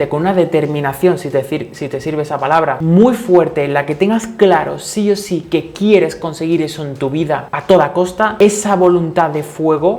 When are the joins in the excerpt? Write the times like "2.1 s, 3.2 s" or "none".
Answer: none